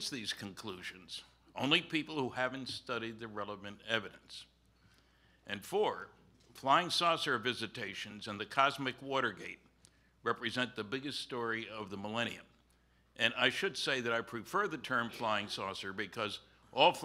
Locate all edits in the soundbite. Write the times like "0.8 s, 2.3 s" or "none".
8.6 s